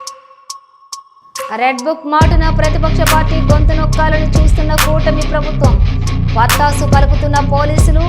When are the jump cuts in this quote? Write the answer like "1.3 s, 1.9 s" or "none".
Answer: 1.4 s